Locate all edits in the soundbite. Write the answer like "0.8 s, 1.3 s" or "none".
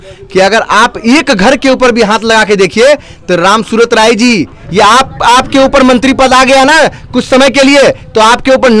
4.6 s

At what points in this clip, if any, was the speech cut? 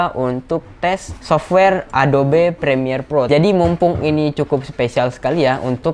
1.1 s, 3.3 s

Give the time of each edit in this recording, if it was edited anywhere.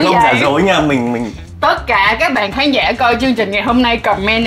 1.4 s

